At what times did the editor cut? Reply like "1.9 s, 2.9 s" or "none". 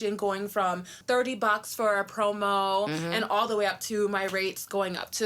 1.0 s

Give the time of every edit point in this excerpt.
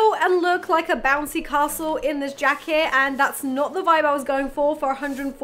none

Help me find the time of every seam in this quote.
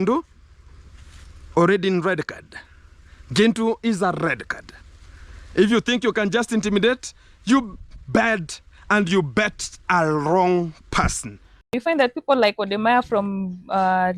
11.8 s

